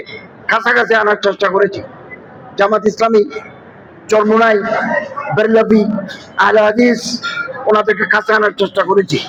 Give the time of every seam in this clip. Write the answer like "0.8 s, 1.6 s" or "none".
none

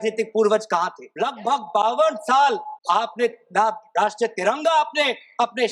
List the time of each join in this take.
1.0 s, 2.7 s

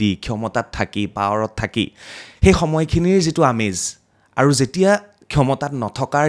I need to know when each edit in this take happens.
none

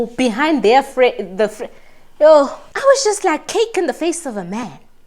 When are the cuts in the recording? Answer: 2.6 s

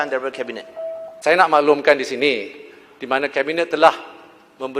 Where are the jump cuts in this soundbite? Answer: 1.1 s

